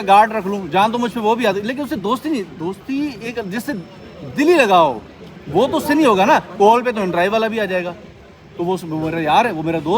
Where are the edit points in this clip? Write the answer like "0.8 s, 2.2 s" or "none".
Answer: none